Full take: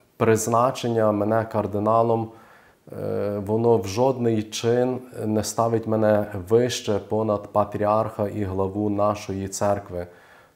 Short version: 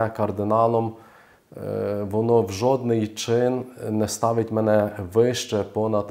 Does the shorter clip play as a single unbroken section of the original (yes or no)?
yes